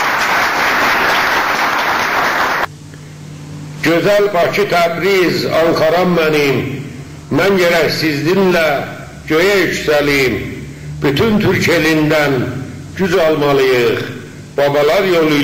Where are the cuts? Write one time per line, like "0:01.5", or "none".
0:02.4

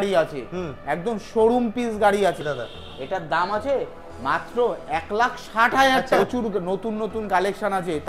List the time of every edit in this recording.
0:02.5
0:06.1

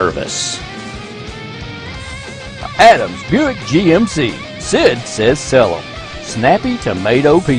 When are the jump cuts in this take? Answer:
none

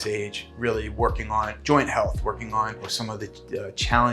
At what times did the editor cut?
0:02.9

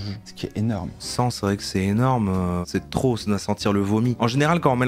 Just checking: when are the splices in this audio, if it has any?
0:01.0
0:02.6
0:04.2

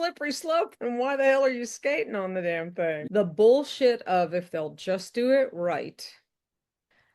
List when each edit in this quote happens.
0:03.0

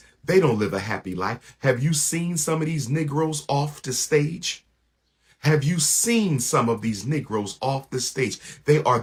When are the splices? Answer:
none

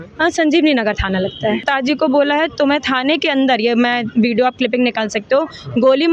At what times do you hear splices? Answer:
0:01.7

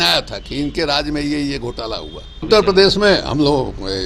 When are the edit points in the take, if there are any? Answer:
0:02.5

